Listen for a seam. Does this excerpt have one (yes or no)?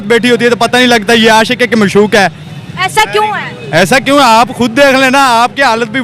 no